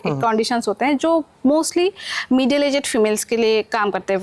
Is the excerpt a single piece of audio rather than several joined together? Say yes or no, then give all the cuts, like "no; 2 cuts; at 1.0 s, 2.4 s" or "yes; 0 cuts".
yes; 0 cuts